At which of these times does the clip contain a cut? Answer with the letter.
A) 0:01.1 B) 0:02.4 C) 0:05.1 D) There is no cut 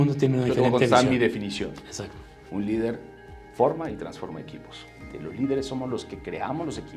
C